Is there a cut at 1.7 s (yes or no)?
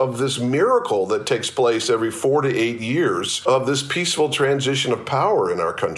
no